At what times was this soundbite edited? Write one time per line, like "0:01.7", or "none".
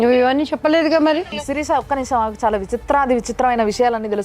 0:01.2